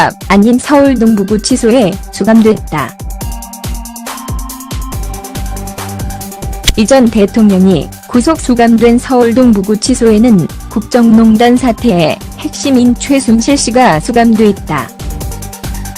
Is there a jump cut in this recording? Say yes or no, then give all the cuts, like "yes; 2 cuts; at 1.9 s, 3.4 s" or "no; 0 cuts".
yes; 1 cut; at 14.1 s